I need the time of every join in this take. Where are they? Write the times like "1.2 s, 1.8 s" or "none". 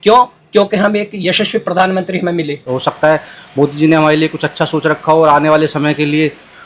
2.7 s